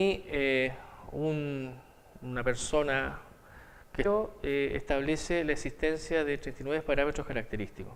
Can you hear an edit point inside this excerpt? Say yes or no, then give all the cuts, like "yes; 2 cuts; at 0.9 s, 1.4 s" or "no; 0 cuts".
no; 0 cuts